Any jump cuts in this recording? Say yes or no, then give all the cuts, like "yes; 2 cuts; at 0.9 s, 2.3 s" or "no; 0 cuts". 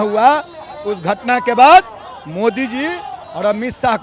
no; 0 cuts